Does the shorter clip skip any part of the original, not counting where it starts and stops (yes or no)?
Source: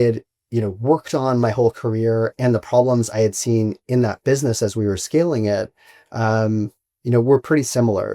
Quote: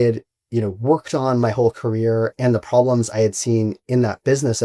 no